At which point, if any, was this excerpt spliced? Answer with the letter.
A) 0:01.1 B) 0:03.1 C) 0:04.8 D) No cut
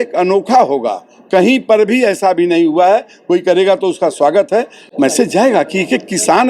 C